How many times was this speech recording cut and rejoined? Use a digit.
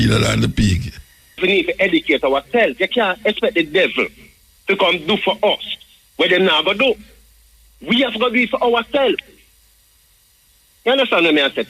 1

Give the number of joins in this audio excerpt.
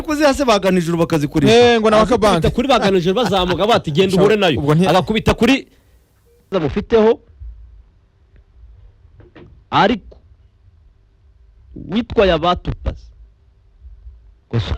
1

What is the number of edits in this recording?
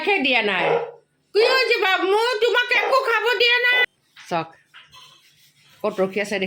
1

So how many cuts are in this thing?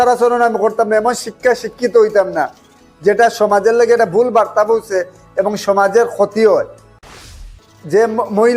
1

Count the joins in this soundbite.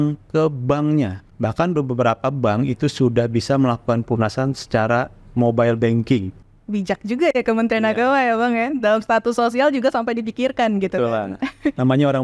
3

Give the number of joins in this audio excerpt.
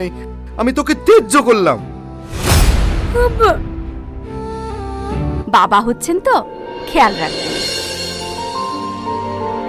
1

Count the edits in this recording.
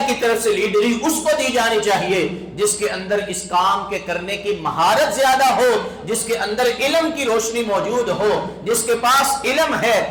0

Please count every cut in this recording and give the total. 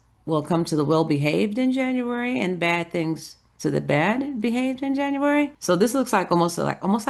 1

